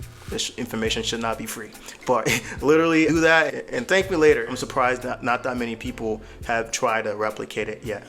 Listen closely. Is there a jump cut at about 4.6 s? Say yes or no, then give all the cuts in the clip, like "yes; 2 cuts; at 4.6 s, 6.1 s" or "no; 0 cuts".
yes; 2 cuts; at 3.5 s, 4.6 s